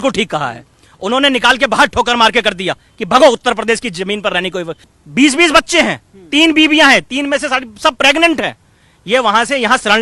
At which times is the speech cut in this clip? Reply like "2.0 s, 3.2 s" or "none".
4.8 s